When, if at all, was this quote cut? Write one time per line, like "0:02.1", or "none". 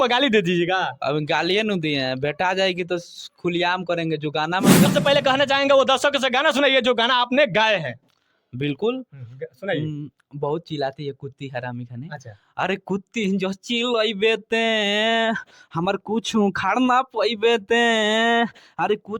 0:04.9